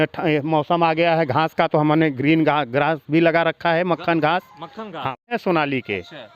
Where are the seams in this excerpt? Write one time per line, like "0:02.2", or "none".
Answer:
0:05.2